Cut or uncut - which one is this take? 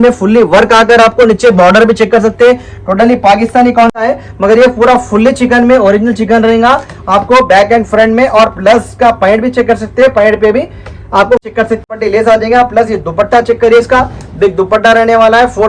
cut